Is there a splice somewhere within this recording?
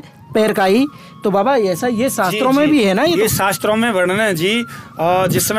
no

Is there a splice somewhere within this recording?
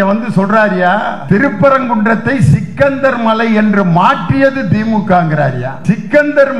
yes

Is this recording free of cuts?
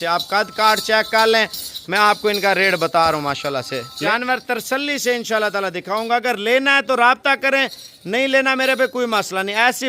no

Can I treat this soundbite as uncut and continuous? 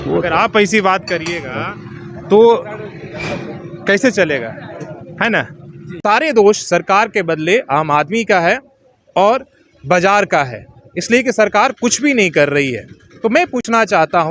no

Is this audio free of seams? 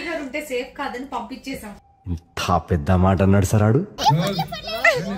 no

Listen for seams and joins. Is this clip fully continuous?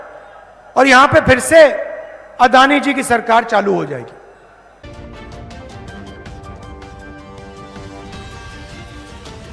no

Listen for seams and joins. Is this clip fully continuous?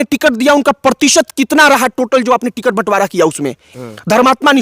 no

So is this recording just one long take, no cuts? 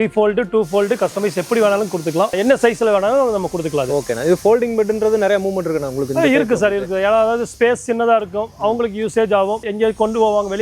yes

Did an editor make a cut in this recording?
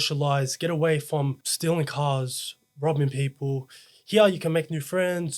yes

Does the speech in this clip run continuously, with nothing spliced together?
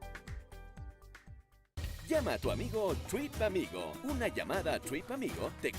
no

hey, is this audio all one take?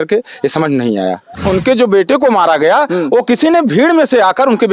no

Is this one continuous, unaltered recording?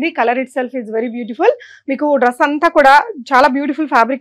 yes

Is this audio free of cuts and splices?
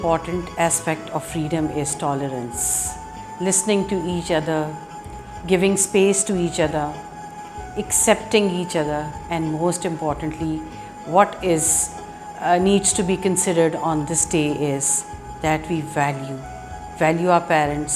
yes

